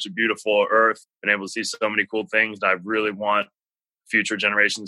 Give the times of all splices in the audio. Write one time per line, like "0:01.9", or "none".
0:01.0